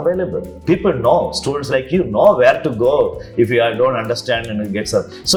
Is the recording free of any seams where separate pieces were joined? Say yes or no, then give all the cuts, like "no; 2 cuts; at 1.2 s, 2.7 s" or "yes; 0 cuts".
yes; 0 cuts